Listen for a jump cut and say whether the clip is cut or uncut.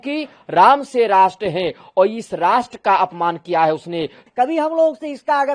cut